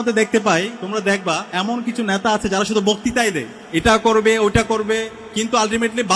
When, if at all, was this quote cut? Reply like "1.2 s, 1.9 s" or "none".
0.9 s, 3.5 s, 5.2 s